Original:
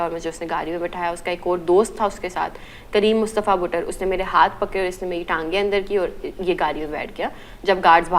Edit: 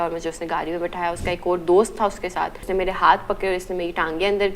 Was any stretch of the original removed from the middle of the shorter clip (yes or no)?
yes